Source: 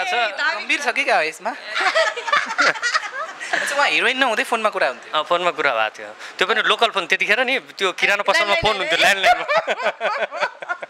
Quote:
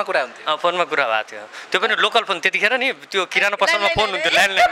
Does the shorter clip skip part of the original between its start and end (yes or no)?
no